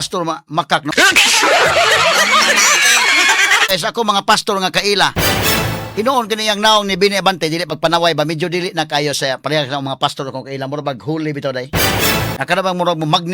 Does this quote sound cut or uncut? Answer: cut